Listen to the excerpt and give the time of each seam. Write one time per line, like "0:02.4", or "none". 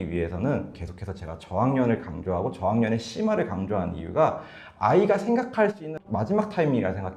none